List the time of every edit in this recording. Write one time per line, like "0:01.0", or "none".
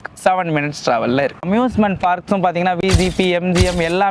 0:01.4